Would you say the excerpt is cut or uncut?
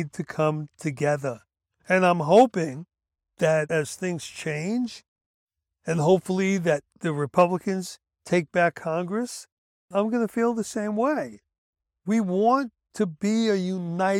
uncut